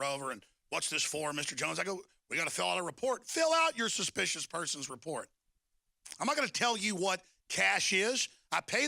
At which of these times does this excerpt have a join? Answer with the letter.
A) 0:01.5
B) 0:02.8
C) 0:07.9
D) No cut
B